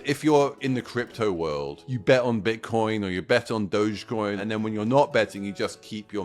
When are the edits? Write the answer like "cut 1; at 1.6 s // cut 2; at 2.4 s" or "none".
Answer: cut 1; at 1.9 s // cut 2; at 4.4 s